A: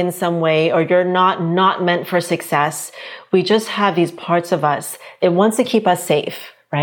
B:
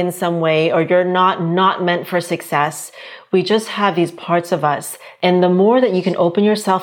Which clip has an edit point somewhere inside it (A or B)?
B